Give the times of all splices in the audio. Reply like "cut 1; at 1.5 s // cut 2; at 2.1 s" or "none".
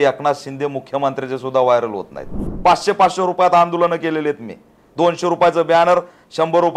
cut 1; at 2.5 s